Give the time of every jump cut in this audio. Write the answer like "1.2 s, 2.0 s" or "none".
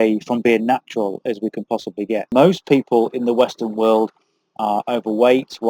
2.3 s